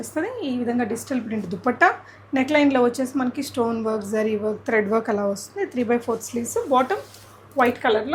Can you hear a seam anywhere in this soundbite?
no; 0 cuts

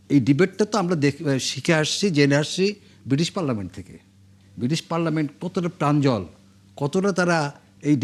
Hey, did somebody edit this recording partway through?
no; 0 cuts

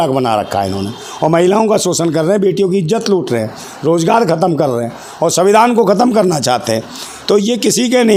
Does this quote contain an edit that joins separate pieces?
no; 0 cuts

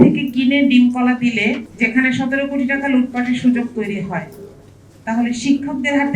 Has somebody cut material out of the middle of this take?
yes; 1 cut; at 1.7 s

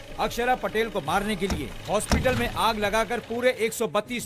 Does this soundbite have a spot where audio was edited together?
no; 0 cuts

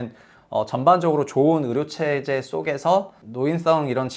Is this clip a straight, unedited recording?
no; 1 cut; at 3.2 s

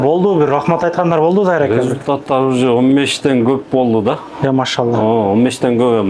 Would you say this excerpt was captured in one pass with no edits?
yes; 0 cuts

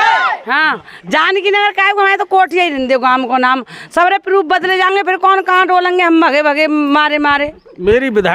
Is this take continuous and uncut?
yes; 0 cuts

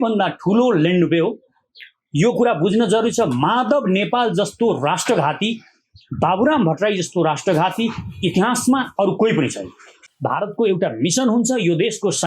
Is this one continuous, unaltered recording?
no; 1 cut; at 10.1 s

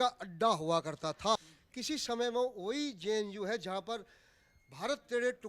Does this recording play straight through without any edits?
no; 1 cut; at 1.4 s

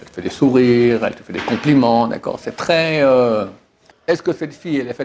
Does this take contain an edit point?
yes; 1 cut; at 3.9 s

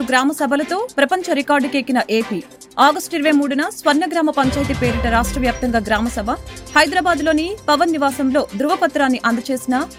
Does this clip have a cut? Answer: no; 0 cuts

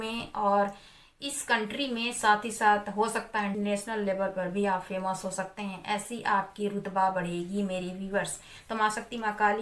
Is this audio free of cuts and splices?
yes; 0 cuts

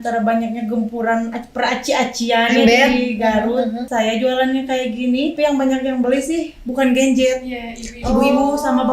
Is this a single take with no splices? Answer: no; 2 cuts; at 3.8 s, 5.4 s

